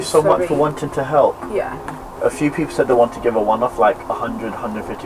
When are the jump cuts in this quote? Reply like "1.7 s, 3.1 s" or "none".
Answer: 2.0 s